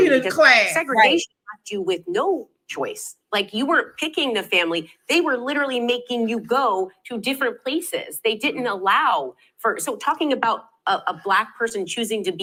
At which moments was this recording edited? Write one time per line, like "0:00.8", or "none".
none